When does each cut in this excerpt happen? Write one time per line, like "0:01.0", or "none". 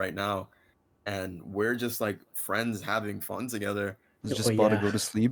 0:04.1